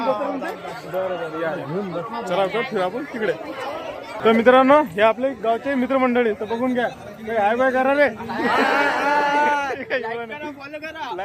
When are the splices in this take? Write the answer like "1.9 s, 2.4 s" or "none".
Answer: 4.1 s